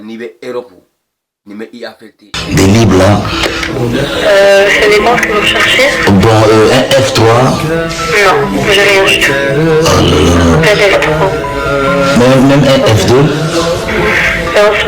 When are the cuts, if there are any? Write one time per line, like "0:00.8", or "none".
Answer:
0:02.4

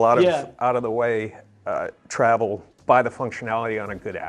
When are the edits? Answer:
0:02.7

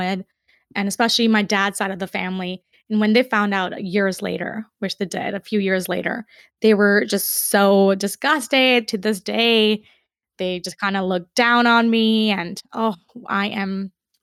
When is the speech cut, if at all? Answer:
none

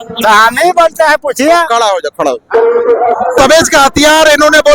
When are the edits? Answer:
0:03.4

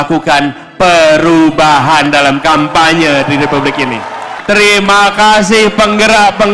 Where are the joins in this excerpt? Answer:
0:04.3

